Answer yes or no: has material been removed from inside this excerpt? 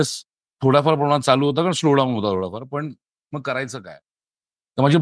no